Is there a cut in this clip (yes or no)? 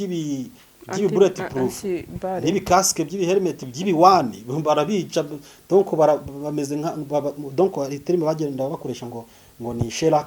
no